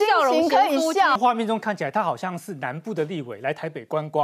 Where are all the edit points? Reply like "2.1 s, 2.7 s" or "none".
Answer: 1.2 s